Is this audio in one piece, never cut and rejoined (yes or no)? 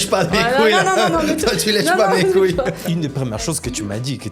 no